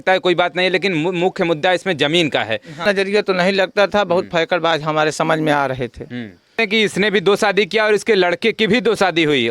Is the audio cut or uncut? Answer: cut